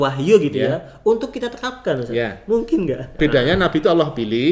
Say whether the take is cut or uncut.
cut